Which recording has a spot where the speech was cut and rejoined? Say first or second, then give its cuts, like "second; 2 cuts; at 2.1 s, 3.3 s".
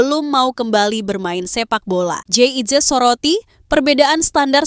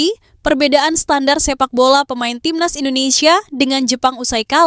first; 1 cut; at 2.2 s